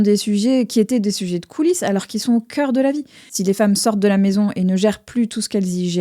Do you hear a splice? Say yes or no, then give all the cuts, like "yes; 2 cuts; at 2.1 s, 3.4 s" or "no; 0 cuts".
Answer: yes; 1 cut; at 3.2 s